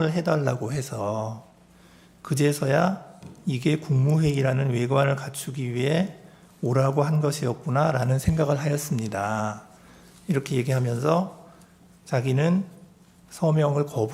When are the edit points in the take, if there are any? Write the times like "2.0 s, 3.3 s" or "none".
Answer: none